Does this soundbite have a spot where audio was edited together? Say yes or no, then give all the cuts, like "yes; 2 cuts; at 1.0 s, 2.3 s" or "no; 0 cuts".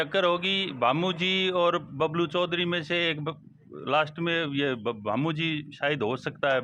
no; 0 cuts